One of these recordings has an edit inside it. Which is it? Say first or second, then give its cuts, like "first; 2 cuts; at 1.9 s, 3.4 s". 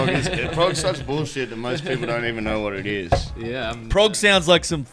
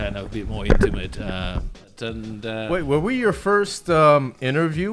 second; 1 cut; at 1.9 s